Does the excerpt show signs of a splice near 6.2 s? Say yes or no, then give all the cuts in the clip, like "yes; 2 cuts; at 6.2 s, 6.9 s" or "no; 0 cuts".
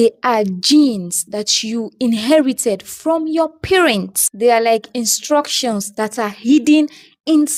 no; 0 cuts